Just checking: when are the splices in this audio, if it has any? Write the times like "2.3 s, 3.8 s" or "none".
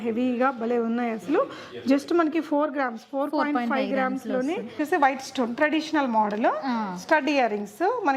4.8 s